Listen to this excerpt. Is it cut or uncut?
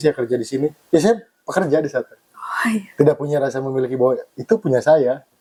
uncut